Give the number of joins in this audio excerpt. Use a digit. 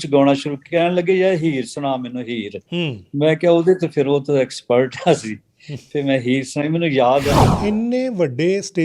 1